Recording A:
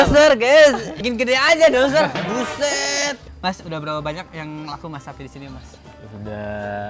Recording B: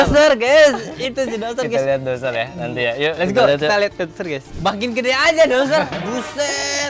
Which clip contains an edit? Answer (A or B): A